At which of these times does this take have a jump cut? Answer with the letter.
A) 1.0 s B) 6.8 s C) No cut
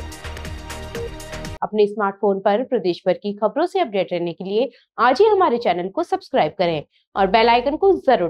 C